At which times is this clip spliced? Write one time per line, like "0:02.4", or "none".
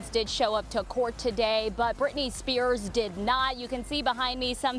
none